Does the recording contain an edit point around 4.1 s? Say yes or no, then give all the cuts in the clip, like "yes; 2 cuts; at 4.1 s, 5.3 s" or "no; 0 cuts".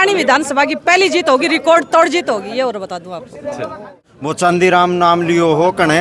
yes; 1 cut; at 4.1 s